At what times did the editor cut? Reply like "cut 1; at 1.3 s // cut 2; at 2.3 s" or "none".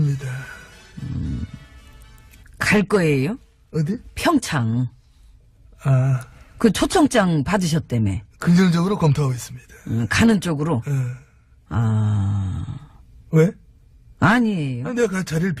none